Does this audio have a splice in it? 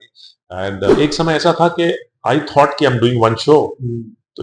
yes; 1 cut; at 0.9 s

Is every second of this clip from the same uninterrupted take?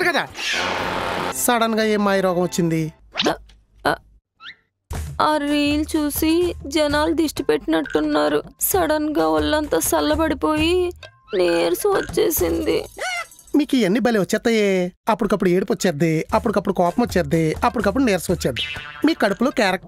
no; 1 cut; at 1.3 s

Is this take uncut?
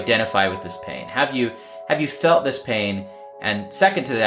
yes; 0 cuts

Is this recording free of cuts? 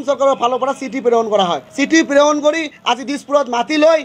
yes; 0 cuts

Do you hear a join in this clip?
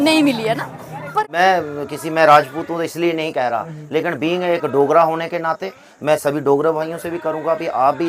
yes; 1 cut; at 1.1 s

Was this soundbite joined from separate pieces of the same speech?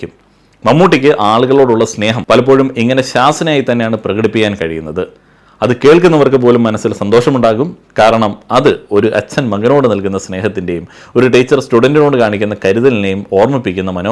no; 0 cuts

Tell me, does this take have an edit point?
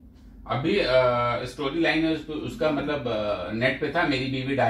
no; 0 cuts

